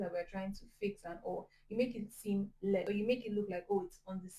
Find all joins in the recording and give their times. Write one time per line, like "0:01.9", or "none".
none